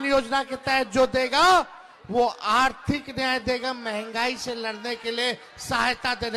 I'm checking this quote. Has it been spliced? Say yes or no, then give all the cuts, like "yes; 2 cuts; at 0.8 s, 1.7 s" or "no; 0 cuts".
no; 0 cuts